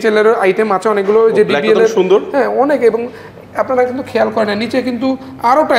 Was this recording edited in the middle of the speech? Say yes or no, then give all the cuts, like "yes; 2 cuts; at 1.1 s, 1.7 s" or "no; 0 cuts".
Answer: no; 0 cuts